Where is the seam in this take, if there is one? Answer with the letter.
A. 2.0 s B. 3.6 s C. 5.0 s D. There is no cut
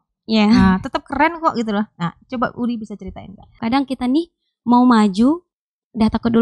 B